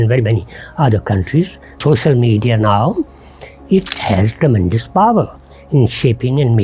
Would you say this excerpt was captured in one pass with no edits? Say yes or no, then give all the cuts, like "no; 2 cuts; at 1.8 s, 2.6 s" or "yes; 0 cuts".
no; 1 cut; at 1.8 s